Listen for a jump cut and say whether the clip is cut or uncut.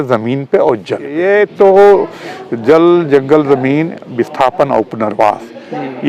cut